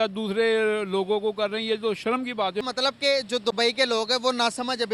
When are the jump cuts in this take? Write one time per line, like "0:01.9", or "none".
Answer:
0:02.6